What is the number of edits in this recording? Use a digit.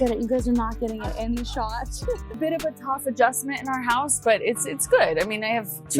1